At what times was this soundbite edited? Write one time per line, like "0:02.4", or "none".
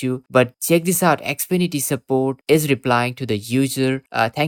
none